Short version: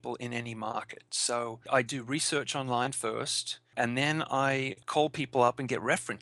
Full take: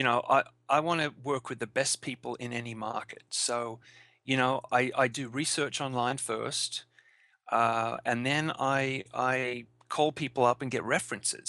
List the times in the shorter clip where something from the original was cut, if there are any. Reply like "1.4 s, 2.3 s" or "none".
1.7 s, 3.7 s, 4.8 s